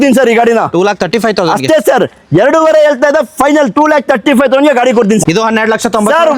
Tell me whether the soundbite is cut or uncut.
cut